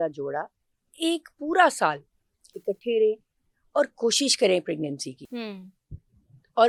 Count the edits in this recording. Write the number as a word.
zero